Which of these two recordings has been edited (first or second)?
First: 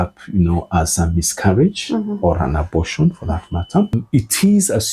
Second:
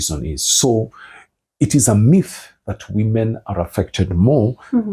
first